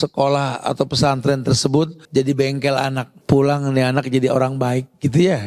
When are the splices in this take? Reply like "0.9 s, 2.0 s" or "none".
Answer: 2.0 s, 3.1 s

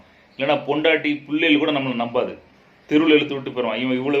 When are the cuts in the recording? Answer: none

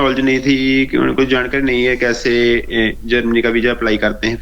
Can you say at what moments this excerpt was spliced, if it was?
none

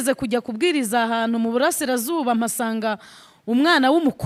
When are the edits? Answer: none

